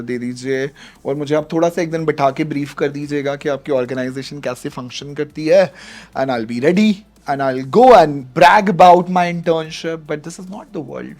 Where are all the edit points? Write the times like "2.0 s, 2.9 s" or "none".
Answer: 8.2 s